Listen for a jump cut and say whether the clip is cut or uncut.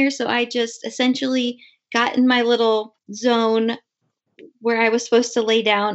cut